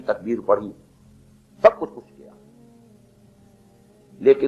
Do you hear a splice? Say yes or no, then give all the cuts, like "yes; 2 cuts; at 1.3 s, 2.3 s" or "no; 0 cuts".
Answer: no; 0 cuts